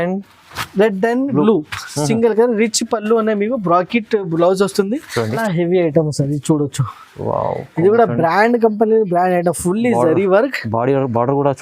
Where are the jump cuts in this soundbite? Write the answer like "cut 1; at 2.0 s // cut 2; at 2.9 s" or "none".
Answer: cut 1; at 5.4 s